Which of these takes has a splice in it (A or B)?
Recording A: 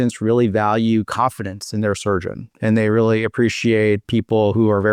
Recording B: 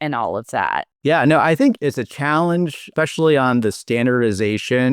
B